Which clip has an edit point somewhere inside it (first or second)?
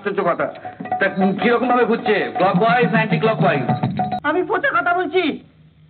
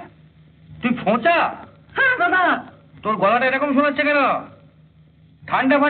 first